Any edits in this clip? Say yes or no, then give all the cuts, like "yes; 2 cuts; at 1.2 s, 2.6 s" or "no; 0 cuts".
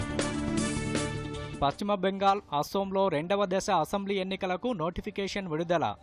yes; 1 cut; at 1.2 s